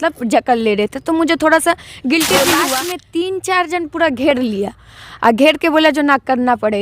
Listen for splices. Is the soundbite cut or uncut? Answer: cut